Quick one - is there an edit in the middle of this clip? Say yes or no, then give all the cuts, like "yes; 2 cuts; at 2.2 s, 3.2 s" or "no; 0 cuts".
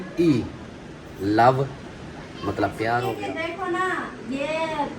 yes; 1 cut; at 3.1 s